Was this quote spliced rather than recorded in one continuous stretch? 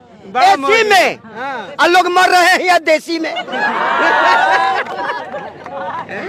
no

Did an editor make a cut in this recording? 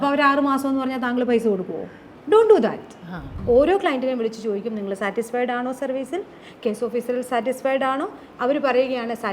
yes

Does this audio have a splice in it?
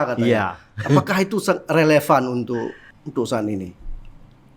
yes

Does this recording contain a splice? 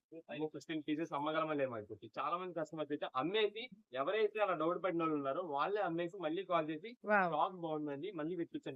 no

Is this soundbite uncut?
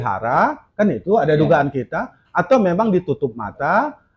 yes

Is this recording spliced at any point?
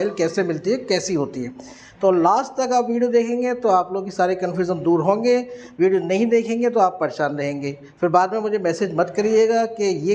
no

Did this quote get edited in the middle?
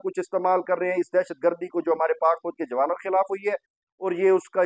no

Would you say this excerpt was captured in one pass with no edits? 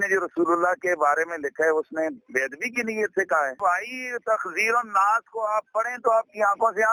yes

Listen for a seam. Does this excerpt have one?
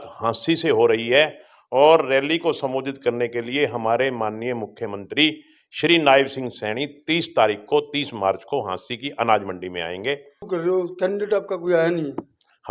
yes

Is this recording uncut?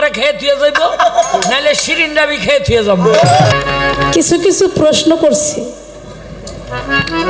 no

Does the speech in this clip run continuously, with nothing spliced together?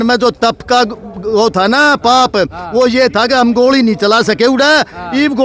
yes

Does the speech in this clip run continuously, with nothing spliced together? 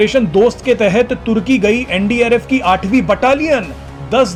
yes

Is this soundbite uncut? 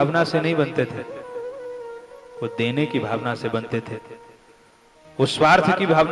yes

